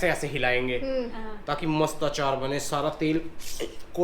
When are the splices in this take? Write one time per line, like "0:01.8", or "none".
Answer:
none